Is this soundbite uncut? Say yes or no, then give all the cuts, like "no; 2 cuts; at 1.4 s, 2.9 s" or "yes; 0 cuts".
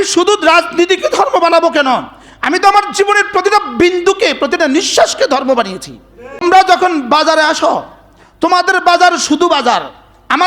no; 1 cut; at 6.4 s